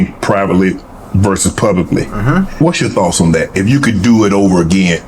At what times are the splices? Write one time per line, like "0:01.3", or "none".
0:02.5

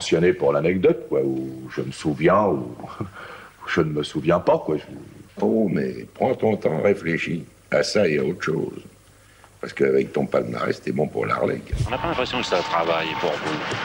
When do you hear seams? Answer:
0:11.8

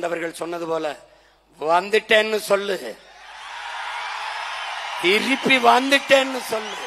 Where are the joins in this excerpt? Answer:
none

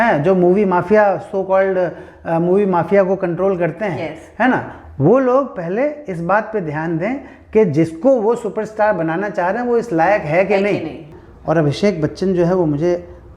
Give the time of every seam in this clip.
0:11.1

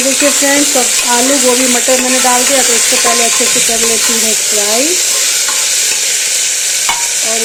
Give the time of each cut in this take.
none

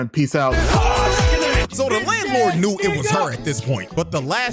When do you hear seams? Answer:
0:01.7

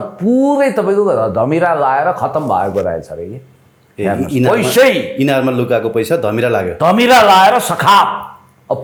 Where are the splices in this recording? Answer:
none

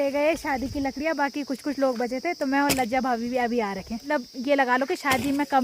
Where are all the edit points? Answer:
0:04.0

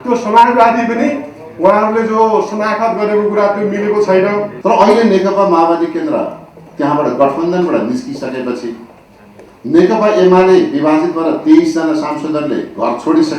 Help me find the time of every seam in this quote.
0:04.5

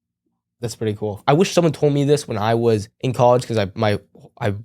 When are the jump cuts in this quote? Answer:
0:01.2
0:03.0

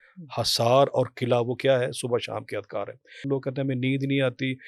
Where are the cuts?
0:03.3

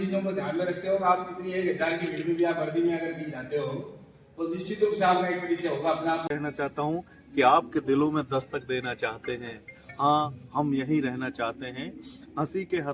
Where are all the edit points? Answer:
0:06.3

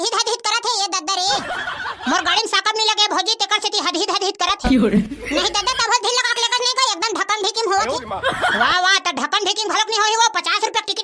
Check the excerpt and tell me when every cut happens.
none

